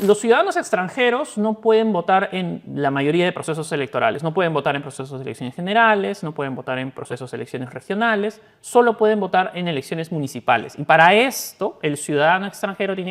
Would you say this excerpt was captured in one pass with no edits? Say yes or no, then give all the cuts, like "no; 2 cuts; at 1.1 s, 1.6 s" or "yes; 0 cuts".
yes; 0 cuts